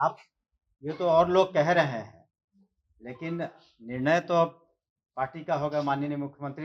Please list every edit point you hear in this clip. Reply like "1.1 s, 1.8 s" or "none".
none